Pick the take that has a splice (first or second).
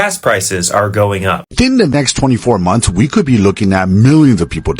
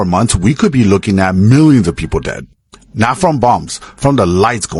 first